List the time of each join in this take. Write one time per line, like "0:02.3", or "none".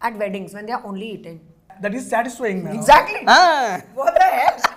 0:01.7